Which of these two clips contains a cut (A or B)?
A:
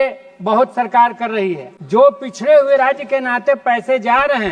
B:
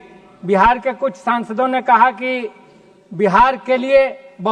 A